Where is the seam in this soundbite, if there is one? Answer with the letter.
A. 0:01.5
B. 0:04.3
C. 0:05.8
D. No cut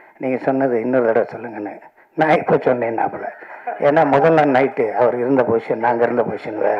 D